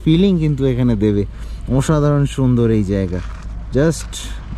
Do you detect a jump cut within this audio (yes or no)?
no